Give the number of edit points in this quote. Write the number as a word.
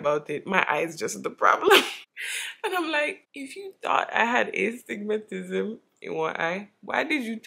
zero